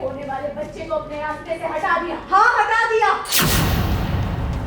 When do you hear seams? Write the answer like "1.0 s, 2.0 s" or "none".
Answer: 3.3 s